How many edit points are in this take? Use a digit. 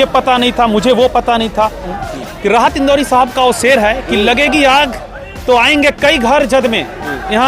1